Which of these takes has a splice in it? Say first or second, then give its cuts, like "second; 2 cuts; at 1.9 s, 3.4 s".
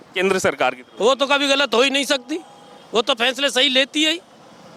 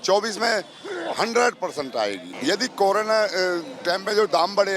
second; 1 cut; at 2.3 s